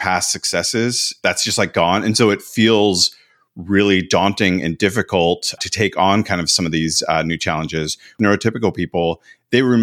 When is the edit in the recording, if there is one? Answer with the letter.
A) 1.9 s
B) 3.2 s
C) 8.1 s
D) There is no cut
C